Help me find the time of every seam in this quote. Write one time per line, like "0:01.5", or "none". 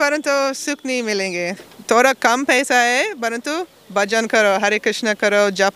0:01.7